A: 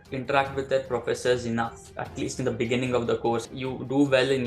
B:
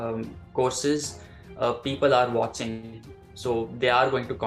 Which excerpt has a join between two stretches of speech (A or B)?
A